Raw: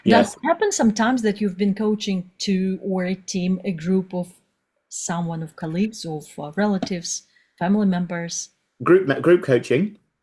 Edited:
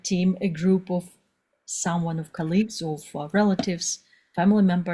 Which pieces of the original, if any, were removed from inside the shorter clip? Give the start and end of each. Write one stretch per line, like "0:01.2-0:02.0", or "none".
none